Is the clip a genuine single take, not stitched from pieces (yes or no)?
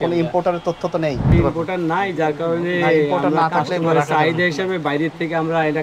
no